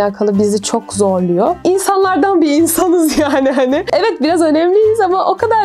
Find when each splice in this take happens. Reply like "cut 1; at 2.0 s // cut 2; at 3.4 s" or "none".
cut 1; at 1.6 s // cut 2; at 3.9 s